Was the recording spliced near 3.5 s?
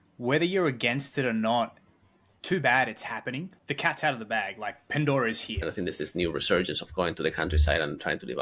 yes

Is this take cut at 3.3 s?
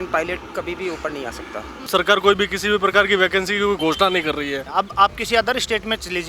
no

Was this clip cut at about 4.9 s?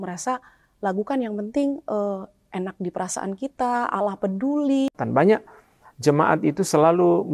yes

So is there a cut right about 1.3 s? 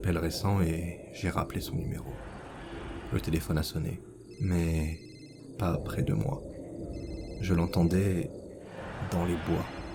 no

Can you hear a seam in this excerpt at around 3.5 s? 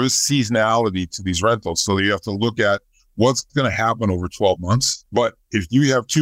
no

